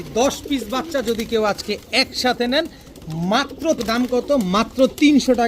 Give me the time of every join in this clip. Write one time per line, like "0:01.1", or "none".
0:03.8

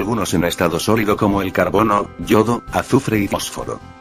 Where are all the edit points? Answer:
0:02.1

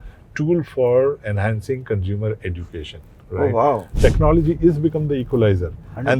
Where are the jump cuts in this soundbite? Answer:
0:03.9

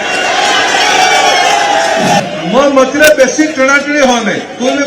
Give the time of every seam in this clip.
0:02.2

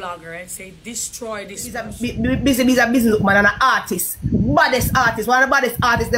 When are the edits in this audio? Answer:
0:02.0

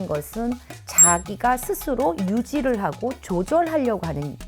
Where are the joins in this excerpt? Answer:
none

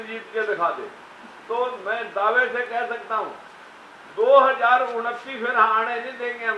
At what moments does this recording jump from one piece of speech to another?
none

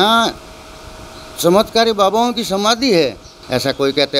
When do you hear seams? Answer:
0:03.3

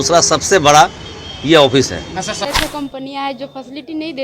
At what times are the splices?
0:02.5

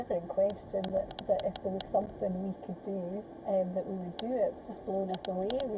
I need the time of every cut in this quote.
0:01.1
0:03.3
0:04.6

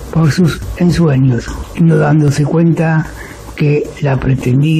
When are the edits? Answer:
0:01.6

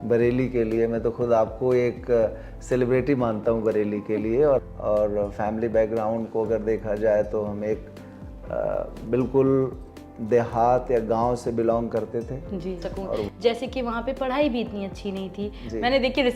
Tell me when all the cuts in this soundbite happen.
0:04.6
0:13.3

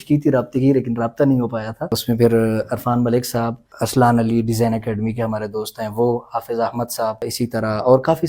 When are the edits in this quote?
0:02.0
0:03.7
0:07.2

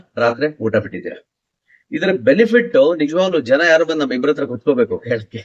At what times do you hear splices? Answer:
none

